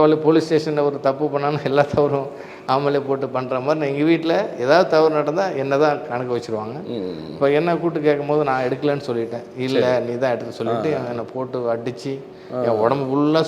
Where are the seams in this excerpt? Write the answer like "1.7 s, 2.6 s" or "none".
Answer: none